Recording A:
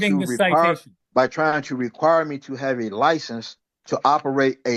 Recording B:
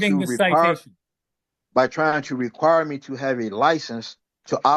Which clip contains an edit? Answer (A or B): A